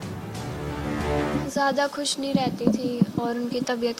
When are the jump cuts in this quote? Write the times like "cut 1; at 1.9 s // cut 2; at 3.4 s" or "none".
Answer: cut 1; at 1.4 s